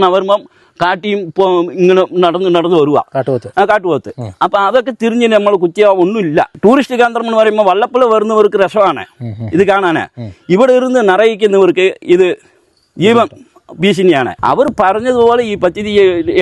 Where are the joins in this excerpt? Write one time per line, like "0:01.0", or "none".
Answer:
0:06.5
0:14.3